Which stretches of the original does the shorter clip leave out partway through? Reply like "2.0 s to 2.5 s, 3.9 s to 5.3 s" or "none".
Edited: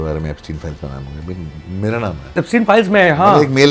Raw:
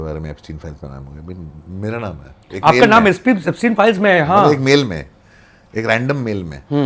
2.4 s to 3.5 s